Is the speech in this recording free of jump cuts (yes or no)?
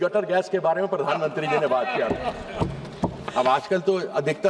no